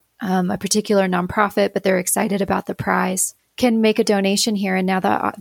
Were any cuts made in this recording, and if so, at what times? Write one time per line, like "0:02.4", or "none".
0:03.3